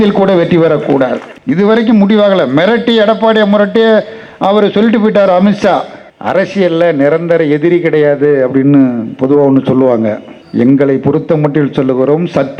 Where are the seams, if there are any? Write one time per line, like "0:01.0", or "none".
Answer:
0:01.3
0:06.0